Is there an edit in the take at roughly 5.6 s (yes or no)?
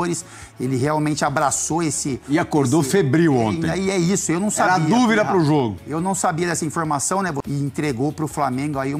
no